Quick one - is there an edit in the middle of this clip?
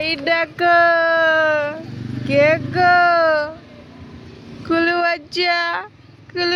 no; 0 cuts

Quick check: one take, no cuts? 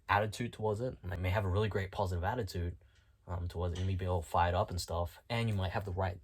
no; 1 cut; at 1.2 s

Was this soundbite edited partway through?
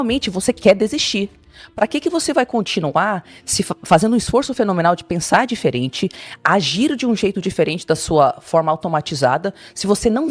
no; 0 cuts

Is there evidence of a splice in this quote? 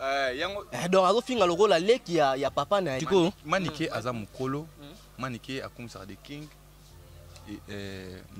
yes; 1 cut; at 3.0 s

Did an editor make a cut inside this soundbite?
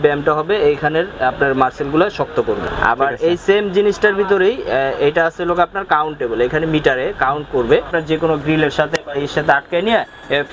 yes; 2 cuts; at 2.7 s, 7.9 s

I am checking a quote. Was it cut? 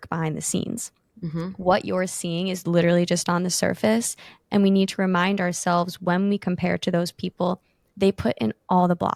no; 0 cuts

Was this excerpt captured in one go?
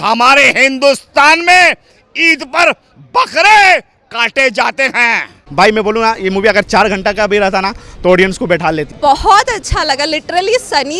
no; 2 cuts; at 5.4 s, 8.9 s

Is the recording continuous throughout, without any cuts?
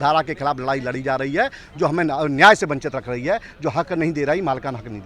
yes; 0 cuts

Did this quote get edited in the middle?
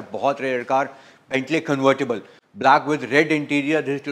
no; 0 cuts

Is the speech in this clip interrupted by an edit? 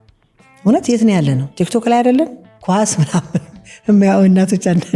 yes; 1 cut; at 2.5 s

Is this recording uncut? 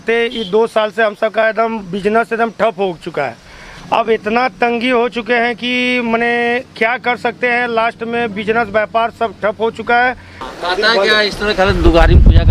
no; 1 cut; at 10.4 s

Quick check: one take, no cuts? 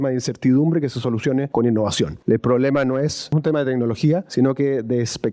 no; 4 cuts; at 1.5 s, 2.2 s, 3.3 s, 4.3 s

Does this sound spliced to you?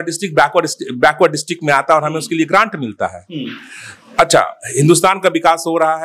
no; 0 cuts

